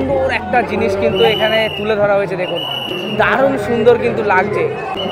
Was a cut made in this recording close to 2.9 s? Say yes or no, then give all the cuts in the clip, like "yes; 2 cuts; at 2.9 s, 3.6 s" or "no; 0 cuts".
no; 0 cuts